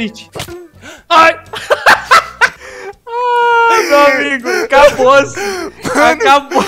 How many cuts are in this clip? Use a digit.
0